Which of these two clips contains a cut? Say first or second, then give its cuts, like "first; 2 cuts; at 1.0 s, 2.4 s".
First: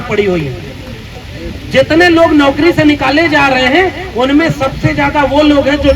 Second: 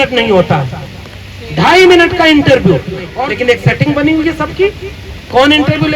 second; 1 cut; at 3.1 s